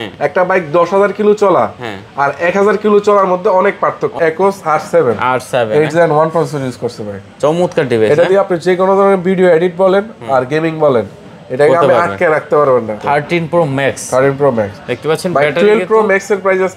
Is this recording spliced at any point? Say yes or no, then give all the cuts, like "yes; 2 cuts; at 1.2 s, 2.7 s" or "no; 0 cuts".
yes; 2 cuts; at 4.2 s, 13.0 s